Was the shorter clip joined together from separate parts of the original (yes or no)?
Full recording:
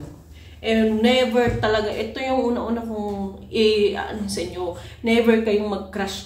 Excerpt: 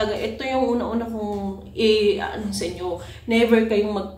no